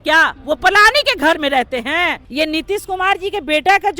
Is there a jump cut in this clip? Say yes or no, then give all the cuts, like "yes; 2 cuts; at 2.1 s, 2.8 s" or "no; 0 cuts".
yes; 1 cut; at 2.2 s